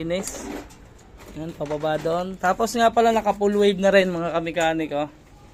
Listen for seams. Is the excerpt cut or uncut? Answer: uncut